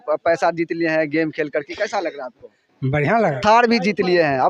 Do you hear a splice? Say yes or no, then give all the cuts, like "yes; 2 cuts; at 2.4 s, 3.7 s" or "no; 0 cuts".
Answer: yes; 1 cut; at 3.4 s